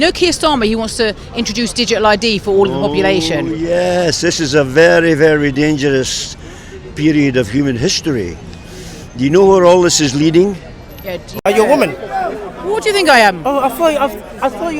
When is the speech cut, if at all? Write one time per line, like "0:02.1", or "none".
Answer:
0:11.3